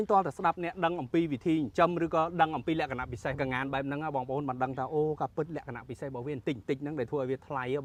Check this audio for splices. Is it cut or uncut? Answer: uncut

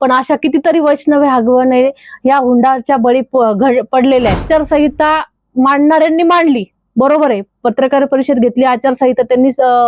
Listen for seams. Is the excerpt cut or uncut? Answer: cut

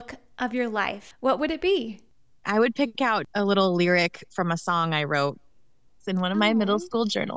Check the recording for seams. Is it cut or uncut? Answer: cut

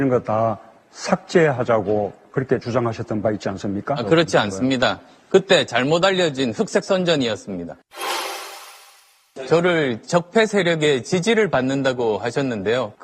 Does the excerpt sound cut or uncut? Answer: cut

